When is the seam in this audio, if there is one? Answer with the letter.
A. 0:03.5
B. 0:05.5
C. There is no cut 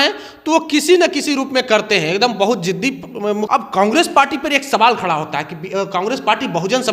A